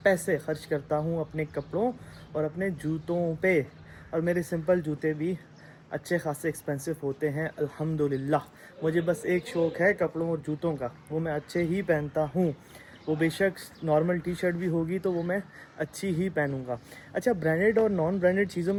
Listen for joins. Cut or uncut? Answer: uncut